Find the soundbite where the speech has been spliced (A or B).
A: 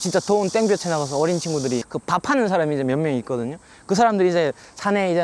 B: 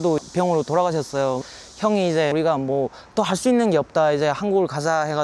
A